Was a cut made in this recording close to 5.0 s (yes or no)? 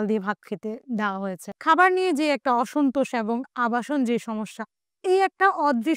no